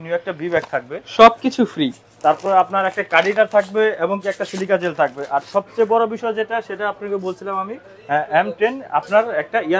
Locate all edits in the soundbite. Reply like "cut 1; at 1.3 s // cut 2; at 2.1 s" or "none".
none